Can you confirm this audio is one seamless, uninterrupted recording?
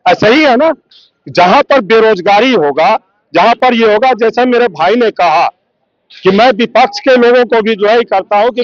yes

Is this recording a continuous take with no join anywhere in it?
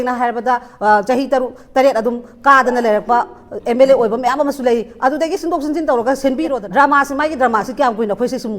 no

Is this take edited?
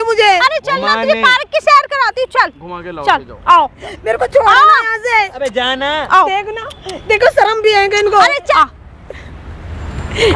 no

